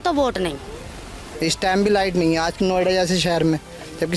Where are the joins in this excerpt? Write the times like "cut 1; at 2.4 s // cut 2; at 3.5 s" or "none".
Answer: cut 1; at 1.2 s